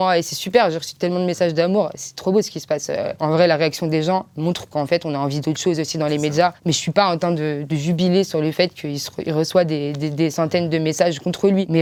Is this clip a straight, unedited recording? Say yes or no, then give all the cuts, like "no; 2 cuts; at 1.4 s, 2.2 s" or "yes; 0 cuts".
yes; 0 cuts